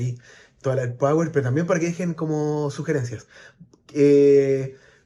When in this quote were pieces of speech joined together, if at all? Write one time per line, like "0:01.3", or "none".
none